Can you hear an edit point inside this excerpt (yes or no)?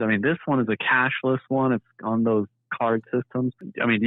no